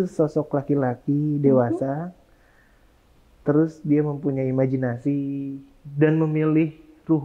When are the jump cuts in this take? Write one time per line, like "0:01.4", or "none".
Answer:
none